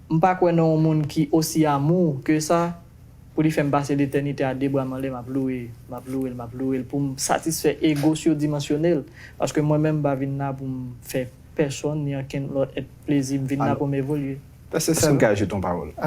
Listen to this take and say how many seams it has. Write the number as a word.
zero